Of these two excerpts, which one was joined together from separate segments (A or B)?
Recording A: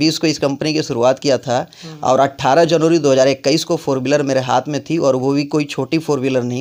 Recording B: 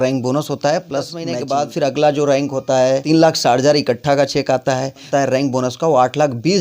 B